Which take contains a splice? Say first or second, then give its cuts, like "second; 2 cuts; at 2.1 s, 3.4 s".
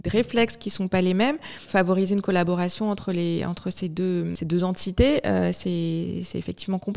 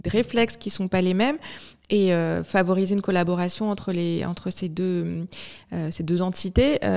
first; 2 cuts; at 1.6 s, 4.4 s